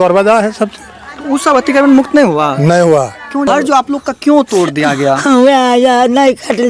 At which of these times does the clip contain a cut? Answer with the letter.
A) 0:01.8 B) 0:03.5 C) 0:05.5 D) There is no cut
B